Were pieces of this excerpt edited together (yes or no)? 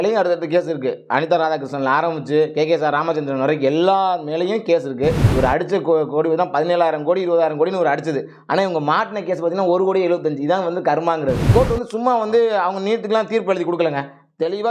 yes